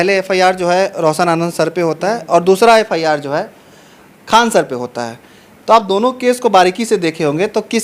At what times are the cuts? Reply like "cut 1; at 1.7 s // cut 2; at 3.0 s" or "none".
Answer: none